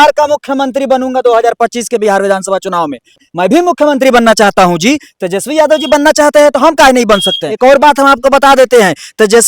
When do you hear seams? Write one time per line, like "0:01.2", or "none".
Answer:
0:03.2
0:07.5

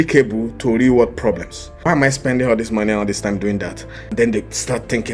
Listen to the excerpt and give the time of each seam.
0:01.8
0:04.1

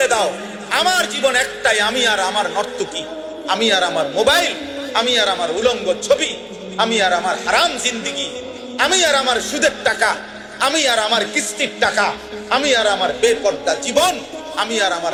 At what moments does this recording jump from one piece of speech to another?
none

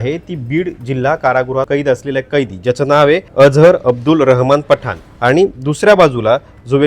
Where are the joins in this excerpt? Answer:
0:01.7
0:03.3
0:05.1

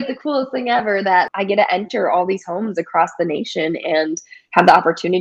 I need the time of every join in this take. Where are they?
0:01.3

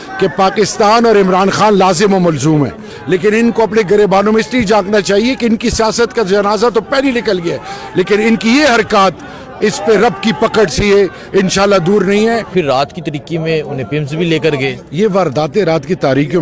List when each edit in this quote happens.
0:02.9
0:12.5

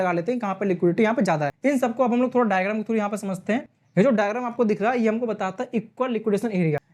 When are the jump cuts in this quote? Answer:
none

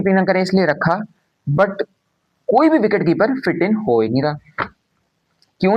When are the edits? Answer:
none

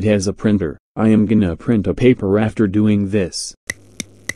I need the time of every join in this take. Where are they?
0:03.4

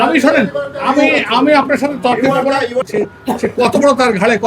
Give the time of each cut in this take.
0:02.8

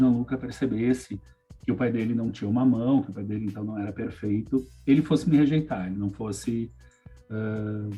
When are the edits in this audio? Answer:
none

